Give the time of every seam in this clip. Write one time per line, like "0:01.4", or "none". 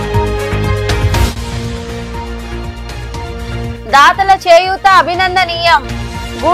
0:01.0